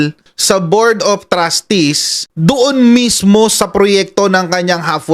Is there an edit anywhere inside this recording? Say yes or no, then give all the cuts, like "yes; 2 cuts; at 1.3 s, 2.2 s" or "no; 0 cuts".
no; 0 cuts